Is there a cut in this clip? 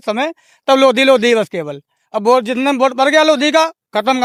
no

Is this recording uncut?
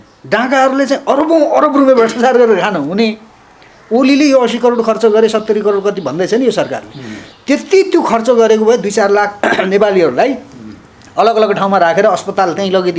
yes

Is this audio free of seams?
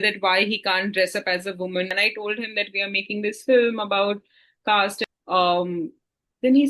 no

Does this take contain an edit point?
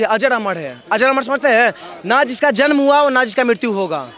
no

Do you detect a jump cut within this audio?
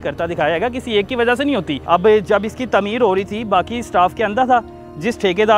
yes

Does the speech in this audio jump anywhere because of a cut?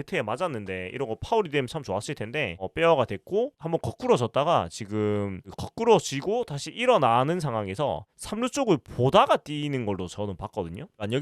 yes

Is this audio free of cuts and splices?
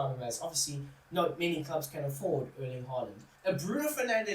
no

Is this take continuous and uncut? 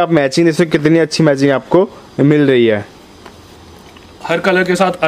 yes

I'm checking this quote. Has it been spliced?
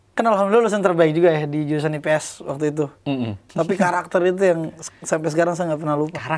yes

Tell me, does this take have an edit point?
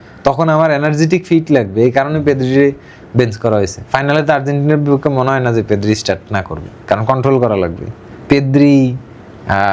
yes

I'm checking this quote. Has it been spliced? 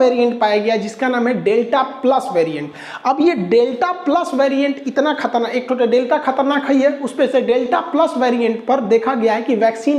no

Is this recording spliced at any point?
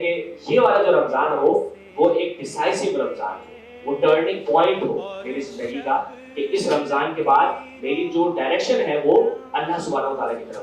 no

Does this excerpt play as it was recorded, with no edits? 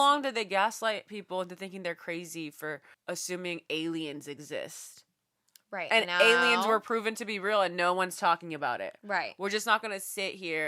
no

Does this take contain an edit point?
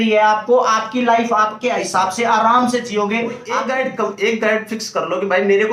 yes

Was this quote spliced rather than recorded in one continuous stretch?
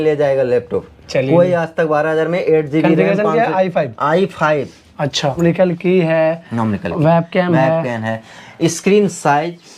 yes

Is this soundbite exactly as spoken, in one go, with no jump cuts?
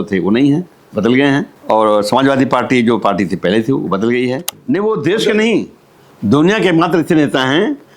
no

